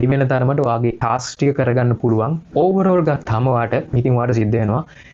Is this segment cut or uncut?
cut